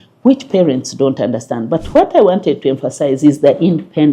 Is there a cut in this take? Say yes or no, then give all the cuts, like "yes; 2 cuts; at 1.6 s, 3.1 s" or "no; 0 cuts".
no; 0 cuts